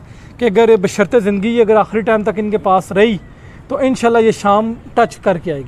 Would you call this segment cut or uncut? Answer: uncut